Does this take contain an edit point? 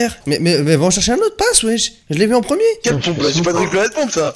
no; 0 cuts

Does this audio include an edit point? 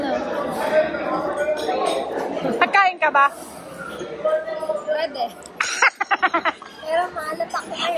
no; 0 cuts

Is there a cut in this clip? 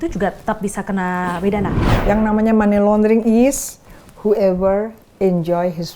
yes; 1 cut; at 1.9 s

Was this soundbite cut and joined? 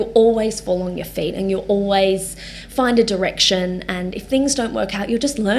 no; 0 cuts

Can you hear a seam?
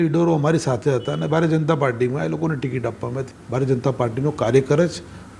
yes; 1 cut; at 3.2 s

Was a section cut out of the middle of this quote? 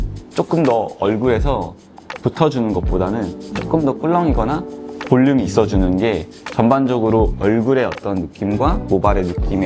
no; 0 cuts

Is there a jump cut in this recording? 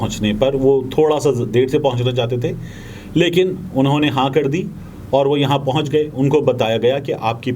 no; 0 cuts

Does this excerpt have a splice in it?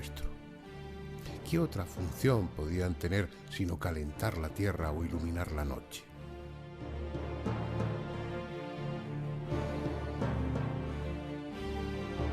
yes; 1 cut; at 1.5 s

